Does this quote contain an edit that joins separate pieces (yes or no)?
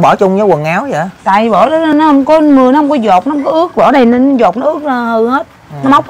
no